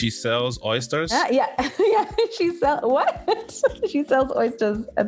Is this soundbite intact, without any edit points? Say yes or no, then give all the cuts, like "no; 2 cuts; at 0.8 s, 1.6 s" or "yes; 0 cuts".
no; 1 cut; at 1.1 s